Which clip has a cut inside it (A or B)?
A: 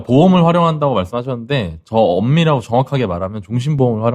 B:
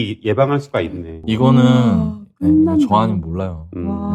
B